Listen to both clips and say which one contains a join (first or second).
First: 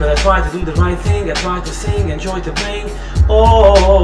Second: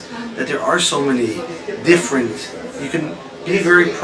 second